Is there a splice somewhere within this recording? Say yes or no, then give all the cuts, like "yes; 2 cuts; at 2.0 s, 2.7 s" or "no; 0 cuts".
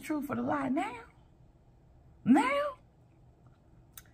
yes; 1 cut; at 2.8 s